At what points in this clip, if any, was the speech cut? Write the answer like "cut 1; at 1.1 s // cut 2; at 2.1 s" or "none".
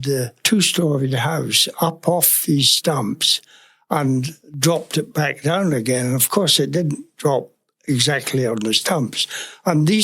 none